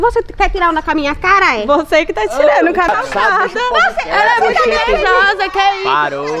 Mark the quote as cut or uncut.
cut